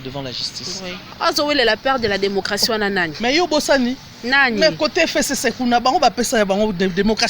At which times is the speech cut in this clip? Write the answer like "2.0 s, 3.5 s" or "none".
1.1 s